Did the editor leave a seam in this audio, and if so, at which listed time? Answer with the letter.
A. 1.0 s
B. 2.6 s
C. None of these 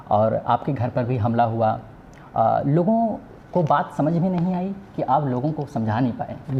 C